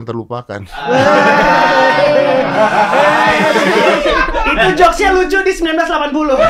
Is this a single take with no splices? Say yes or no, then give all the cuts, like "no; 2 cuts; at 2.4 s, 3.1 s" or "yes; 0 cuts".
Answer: yes; 0 cuts